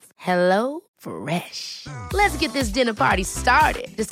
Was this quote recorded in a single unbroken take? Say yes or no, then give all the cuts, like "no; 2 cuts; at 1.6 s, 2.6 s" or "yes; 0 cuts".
yes; 0 cuts